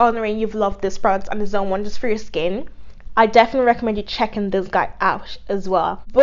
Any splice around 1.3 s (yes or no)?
no